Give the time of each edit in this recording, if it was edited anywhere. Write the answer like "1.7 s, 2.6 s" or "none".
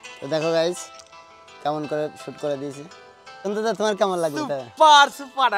3.5 s